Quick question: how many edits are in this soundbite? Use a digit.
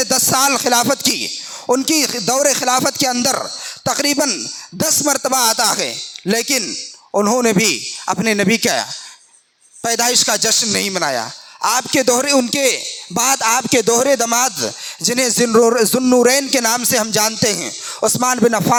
0